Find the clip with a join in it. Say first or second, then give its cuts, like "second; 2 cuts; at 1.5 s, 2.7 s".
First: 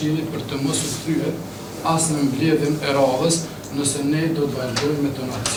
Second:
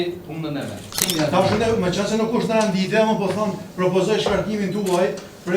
second; 1 cut; at 1.0 s